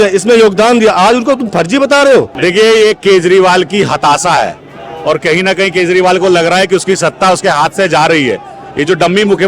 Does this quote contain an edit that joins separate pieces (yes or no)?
yes